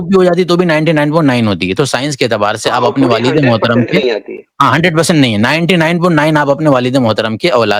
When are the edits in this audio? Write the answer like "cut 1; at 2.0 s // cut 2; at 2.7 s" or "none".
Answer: none